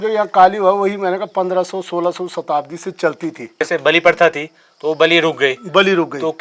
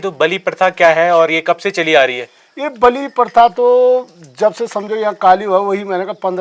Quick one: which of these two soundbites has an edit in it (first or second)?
first